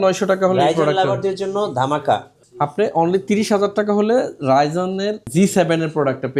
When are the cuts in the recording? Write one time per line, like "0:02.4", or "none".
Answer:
0:05.2